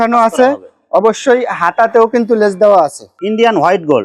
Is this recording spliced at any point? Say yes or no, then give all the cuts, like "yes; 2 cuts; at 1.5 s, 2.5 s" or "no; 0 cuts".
yes; 1 cut; at 3.1 s